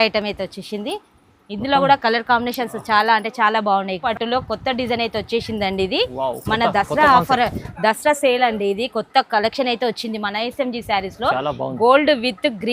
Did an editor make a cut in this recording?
yes; 1 cut; at 4.1 s

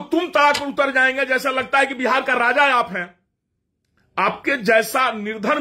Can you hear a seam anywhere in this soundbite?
no; 0 cuts

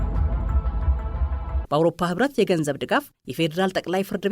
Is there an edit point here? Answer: yes; 1 cut; at 1.0 s

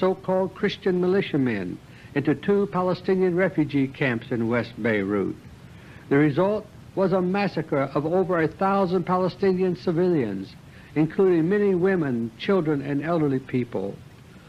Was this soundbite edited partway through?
no; 0 cuts

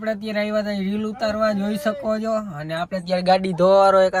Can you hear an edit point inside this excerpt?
no; 0 cuts

